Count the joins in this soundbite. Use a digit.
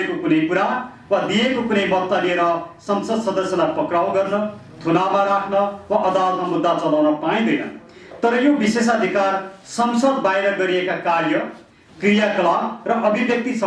0